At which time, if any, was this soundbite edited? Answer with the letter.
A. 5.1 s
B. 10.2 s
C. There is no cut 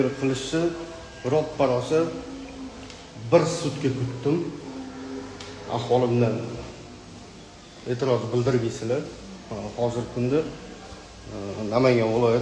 C